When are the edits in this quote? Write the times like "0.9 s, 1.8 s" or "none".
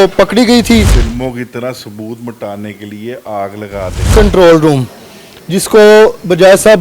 1.0 s, 4.1 s